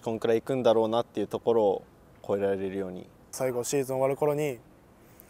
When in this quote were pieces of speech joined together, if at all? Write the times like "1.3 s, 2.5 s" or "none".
3.3 s